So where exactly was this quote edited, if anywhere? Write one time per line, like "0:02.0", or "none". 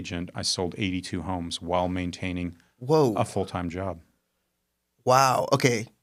none